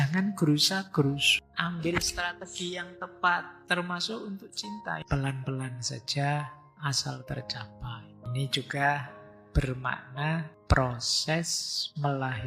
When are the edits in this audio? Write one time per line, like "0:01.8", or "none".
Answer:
0:01.3
0:05.0
0:08.3
0:10.5